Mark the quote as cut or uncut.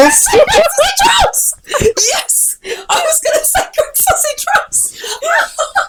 uncut